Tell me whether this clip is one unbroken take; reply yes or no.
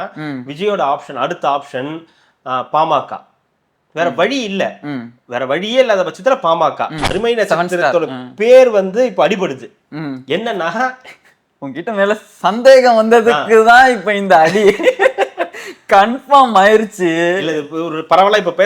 no